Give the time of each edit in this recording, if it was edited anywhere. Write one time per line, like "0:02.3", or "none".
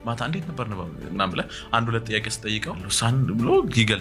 0:02.9